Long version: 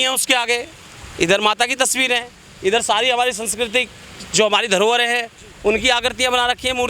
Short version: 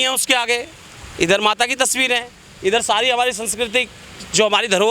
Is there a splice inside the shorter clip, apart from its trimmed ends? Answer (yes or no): no